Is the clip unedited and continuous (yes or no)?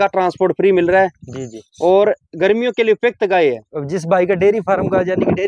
yes